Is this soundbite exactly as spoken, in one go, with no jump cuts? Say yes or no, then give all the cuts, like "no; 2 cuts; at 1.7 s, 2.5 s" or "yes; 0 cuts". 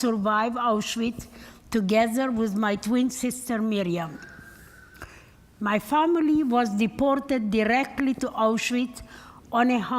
no; 1 cut; at 2.8 s